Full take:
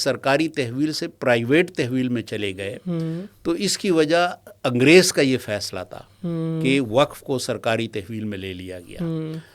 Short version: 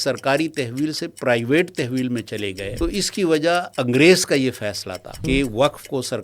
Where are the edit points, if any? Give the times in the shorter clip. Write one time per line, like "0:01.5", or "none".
0:02.7
0:03.7
0:05.2